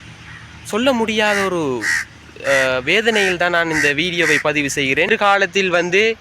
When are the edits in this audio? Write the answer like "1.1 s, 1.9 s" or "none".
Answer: 5.1 s